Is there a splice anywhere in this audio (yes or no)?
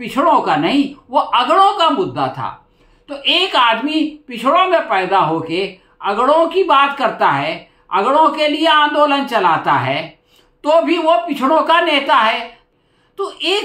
yes